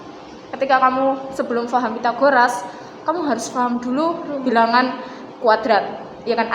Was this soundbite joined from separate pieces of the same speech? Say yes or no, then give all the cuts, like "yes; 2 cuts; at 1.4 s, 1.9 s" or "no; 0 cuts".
no; 0 cuts